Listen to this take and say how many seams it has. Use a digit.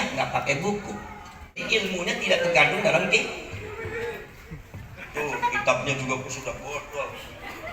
1